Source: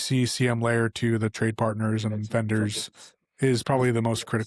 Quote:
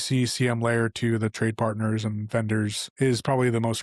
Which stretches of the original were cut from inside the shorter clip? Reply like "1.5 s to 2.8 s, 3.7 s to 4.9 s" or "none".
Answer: 2.8 s to 3.2 s